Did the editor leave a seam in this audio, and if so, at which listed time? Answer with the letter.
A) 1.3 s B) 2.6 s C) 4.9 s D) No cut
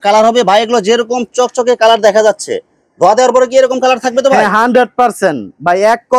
D